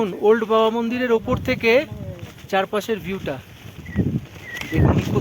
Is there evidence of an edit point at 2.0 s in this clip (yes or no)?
no